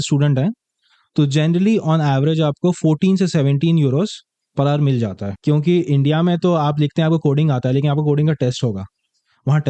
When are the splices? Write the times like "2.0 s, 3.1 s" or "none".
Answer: 5.3 s